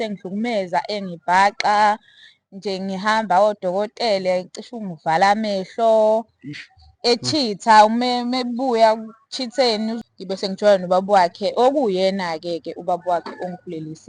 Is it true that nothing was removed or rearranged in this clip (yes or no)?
no